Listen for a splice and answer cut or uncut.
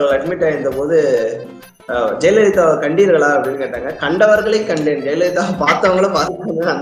uncut